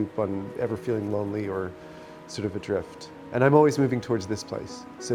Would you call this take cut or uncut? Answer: uncut